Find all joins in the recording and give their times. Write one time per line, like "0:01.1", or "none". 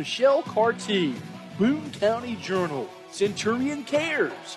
none